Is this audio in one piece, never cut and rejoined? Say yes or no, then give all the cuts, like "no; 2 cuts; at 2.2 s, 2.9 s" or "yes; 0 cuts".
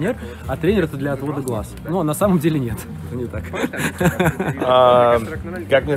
yes; 0 cuts